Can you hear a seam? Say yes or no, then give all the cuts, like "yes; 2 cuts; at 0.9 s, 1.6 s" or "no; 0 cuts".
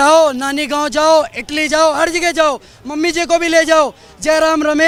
no; 0 cuts